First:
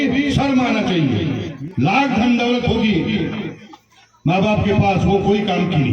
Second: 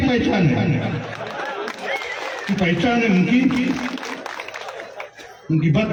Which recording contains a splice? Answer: first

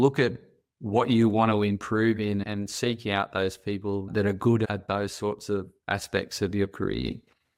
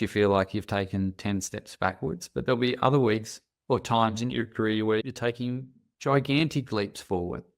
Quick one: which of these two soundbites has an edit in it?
second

